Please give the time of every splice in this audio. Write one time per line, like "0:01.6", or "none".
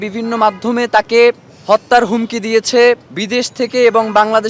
0:01.5
0:03.1